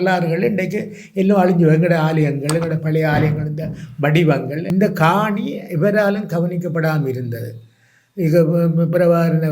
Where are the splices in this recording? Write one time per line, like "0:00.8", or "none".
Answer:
0:04.6